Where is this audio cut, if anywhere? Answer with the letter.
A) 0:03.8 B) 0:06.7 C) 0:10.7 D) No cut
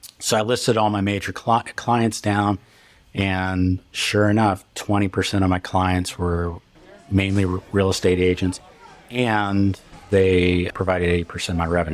C